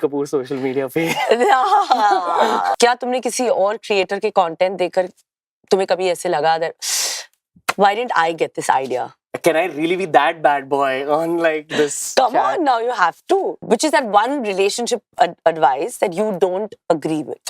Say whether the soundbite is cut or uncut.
cut